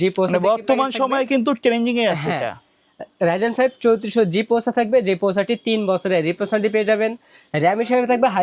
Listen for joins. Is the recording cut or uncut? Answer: uncut